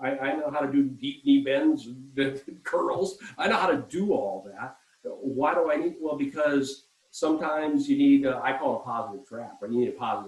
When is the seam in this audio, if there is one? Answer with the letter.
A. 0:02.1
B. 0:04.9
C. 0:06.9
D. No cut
D